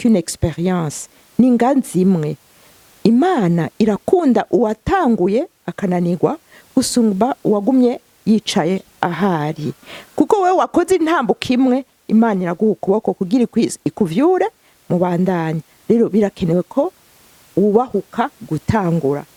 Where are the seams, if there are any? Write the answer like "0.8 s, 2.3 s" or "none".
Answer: none